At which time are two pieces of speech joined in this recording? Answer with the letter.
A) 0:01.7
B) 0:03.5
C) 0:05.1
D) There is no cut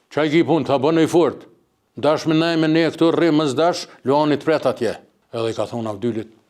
C